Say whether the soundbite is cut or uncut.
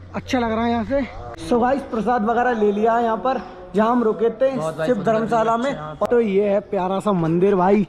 cut